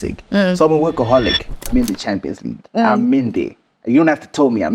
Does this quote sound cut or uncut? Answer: cut